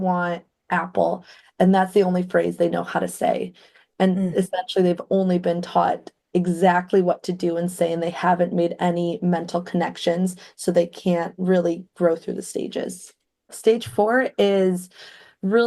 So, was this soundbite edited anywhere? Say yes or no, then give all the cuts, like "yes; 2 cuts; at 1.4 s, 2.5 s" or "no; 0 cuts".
yes; 1 cut; at 13.6 s